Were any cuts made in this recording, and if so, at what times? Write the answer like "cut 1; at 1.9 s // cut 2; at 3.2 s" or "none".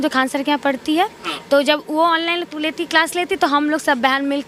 none